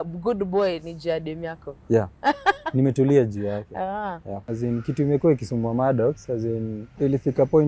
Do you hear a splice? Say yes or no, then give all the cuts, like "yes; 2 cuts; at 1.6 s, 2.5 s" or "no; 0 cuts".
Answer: yes; 2 cuts; at 4.4 s, 6.8 s